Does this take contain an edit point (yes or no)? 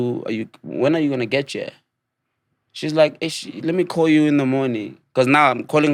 no